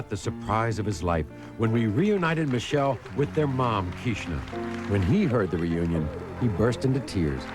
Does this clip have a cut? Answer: no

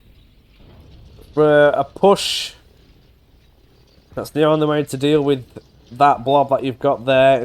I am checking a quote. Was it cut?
no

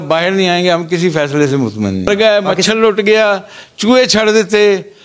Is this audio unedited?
no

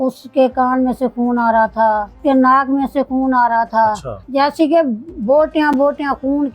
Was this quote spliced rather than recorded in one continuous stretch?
yes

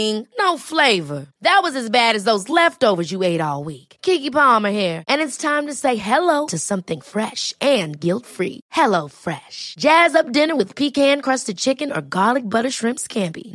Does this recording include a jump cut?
no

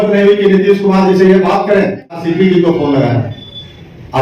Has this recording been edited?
yes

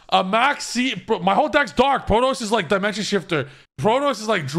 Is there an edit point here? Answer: yes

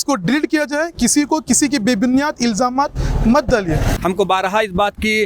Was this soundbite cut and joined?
yes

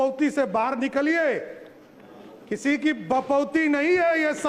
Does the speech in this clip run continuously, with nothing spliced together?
yes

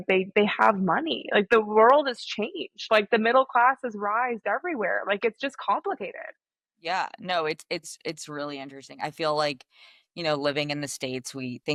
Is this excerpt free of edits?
yes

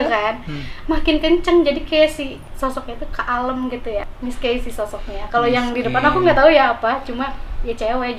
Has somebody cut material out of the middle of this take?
yes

